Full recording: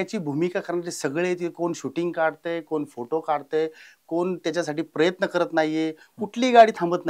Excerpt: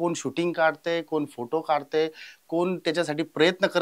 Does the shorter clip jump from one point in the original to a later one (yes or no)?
no